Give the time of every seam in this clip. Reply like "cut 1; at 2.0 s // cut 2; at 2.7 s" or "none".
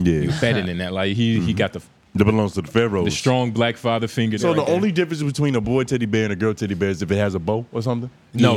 cut 1; at 4.4 s